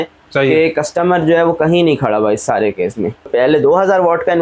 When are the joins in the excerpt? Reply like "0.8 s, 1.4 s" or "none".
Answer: 3.3 s